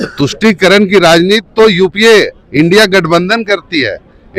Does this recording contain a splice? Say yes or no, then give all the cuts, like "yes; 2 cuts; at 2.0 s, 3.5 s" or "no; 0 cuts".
no; 0 cuts